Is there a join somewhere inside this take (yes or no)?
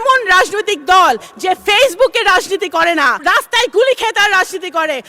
yes